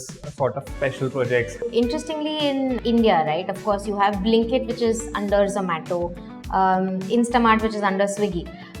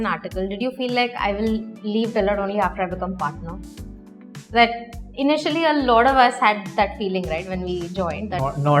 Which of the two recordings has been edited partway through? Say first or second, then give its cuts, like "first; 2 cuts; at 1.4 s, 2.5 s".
first; 1 cut; at 1.6 s